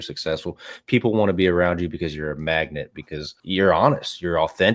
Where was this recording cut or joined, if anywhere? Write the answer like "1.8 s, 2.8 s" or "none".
none

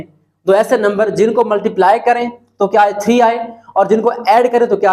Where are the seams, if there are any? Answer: none

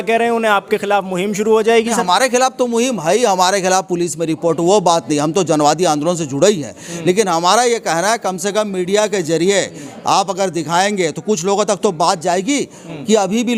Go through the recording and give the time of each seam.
none

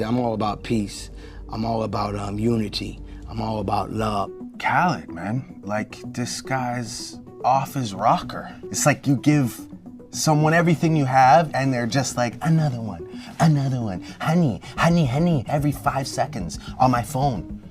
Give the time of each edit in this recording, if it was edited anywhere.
4.4 s

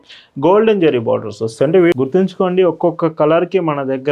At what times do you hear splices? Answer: 2.0 s

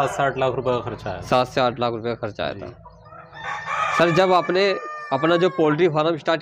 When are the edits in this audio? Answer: none

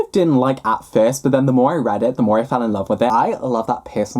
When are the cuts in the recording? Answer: 3.1 s

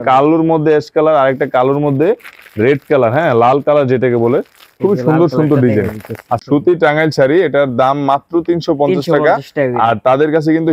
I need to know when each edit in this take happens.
6.3 s

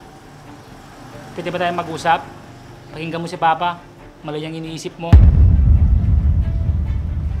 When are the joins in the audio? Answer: 5.1 s

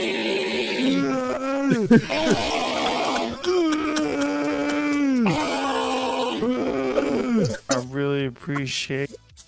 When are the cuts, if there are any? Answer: none

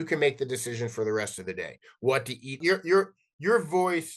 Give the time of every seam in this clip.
2.6 s

